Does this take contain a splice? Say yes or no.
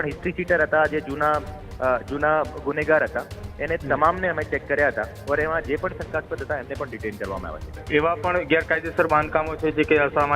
yes